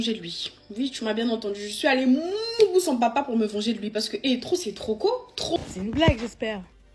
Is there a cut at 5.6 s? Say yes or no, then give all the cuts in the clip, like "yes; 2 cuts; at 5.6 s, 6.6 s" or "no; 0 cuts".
yes; 1 cut; at 5.6 s